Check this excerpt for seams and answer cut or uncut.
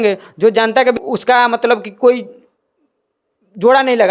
cut